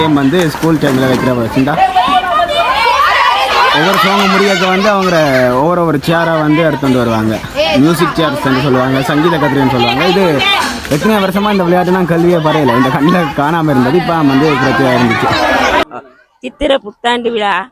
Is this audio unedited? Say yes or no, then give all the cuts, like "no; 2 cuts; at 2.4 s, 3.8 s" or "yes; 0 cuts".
yes; 0 cuts